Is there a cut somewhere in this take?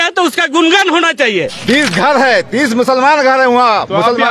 yes; 1 cut; at 1.6 s

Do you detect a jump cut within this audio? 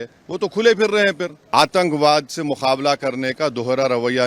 yes; 1 cut; at 1.4 s

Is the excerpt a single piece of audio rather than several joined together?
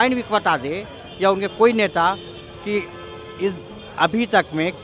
yes; 0 cuts

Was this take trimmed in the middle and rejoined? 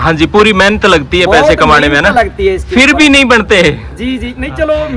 no; 0 cuts

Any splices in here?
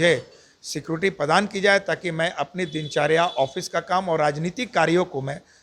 no; 0 cuts

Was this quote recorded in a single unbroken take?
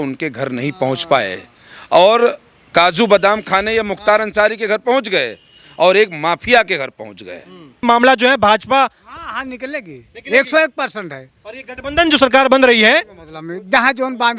no; 1 cut; at 7.8 s

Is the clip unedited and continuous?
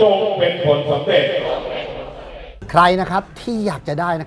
no; 1 cut; at 2.5 s

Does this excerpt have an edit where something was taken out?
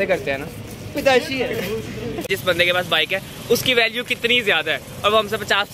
yes; 1 cut; at 2.3 s

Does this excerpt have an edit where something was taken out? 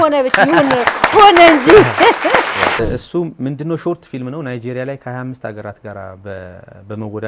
yes; 1 cut; at 2.8 s

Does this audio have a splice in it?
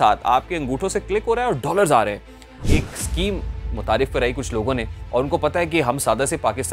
yes; 1 cut; at 2.6 s

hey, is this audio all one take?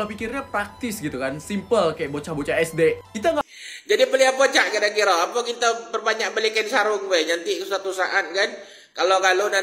no; 1 cut; at 3.4 s

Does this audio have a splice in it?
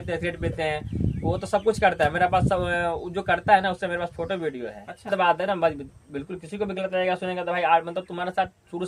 yes; 1 cut; at 5.1 s

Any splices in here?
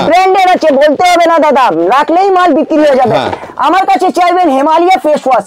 no; 0 cuts

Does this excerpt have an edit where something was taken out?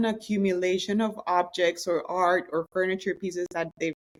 no; 0 cuts

